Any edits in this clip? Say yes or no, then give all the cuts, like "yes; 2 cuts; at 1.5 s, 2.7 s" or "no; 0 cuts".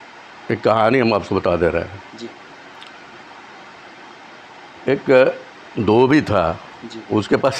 no; 0 cuts